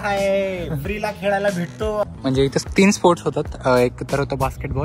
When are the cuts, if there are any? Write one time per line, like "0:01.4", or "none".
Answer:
0:02.1